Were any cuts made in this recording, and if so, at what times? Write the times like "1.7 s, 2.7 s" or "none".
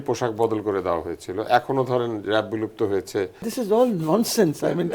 3.4 s